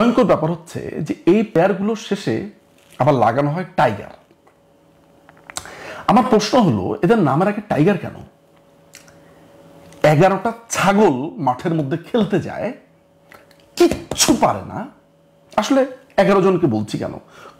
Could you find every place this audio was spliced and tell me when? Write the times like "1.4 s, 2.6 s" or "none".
1.6 s